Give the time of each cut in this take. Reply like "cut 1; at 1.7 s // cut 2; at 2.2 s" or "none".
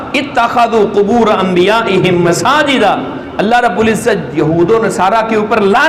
none